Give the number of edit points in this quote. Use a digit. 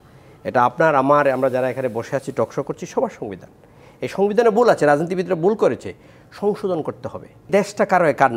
1